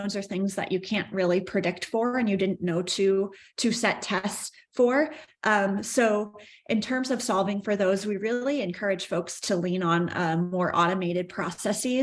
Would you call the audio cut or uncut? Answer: uncut